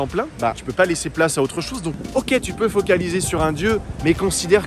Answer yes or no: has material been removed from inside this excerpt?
yes